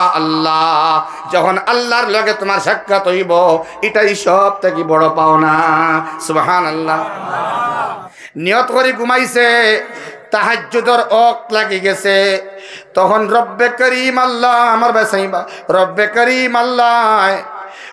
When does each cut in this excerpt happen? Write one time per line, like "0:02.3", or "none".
0:08.1